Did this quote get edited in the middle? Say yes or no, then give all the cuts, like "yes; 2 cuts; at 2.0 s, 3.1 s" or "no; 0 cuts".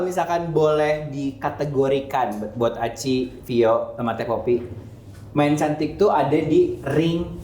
no; 0 cuts